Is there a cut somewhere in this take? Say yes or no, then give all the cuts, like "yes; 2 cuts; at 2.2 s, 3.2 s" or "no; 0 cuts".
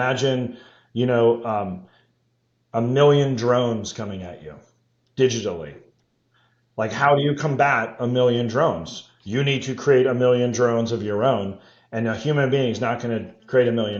no; 0 cuts